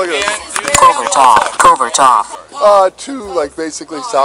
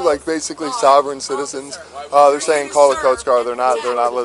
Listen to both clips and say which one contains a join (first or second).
first